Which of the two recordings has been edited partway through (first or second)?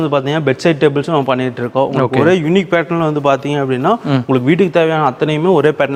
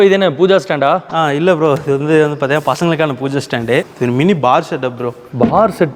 second